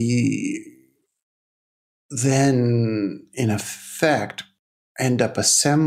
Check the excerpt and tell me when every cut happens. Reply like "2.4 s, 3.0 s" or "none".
none